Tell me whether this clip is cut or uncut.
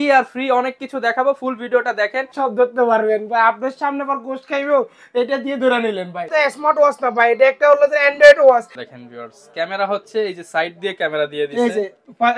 cut